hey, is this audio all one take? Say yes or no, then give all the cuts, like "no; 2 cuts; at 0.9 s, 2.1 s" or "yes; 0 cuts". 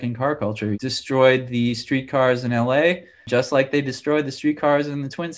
no; 2 cuts; at 0.8 s, 3.2 s